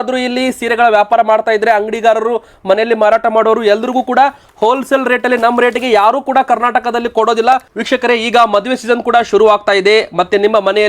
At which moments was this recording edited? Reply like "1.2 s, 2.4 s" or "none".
7.8 s